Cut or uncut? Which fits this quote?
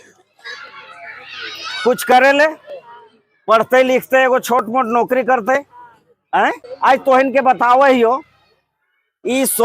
cut